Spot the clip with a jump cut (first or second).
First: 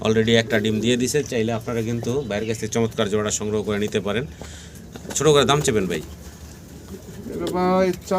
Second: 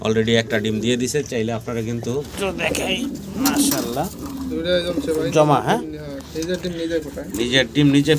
second